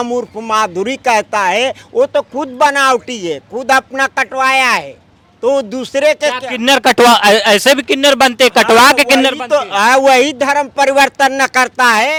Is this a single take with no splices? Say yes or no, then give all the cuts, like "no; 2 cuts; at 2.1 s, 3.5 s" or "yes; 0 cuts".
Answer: yes; 0 cuts